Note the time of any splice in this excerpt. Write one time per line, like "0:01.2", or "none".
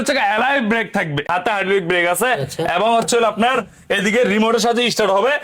0:01.3